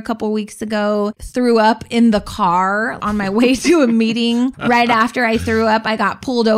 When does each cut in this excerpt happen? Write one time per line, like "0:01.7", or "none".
0:01.2
0:03.0
0:04.5